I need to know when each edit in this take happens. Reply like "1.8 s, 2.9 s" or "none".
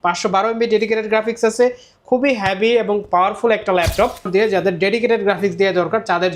4.3 s